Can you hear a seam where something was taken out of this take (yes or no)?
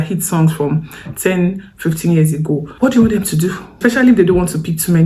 yes